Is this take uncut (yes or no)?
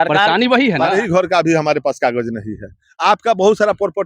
no